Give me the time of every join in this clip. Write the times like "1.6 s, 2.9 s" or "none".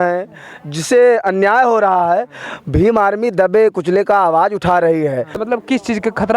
5.3 s